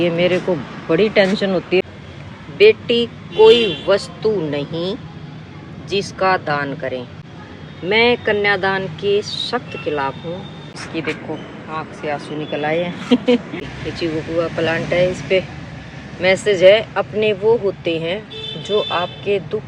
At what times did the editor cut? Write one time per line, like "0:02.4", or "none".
0:01.8
0:10.8
0:13.7